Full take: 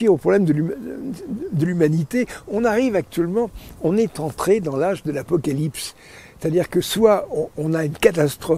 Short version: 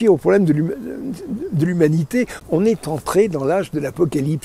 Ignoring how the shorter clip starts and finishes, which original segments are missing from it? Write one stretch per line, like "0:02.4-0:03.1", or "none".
0:02.4-0:03.7